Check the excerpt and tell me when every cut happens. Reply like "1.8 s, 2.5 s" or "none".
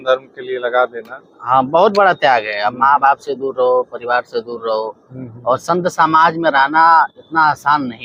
none

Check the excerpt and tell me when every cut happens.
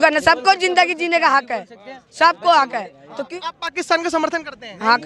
3.3 s

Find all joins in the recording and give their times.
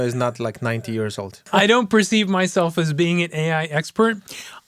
1.5 s

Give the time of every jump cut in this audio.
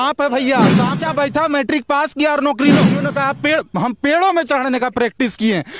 1.0 s, 3.0 s

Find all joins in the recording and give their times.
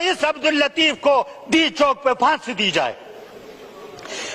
none

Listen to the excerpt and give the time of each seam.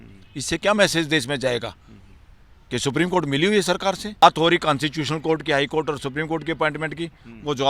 4.2 s

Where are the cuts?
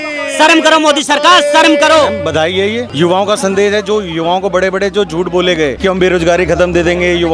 2.4 s, 5.8 s

